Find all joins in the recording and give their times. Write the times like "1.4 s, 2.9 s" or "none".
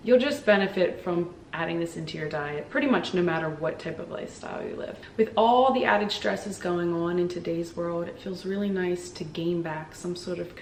none